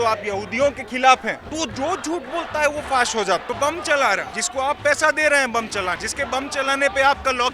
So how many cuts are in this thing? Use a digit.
4